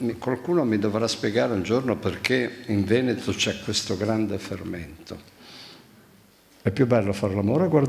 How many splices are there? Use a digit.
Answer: 1